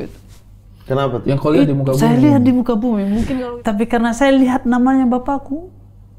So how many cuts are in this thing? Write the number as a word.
one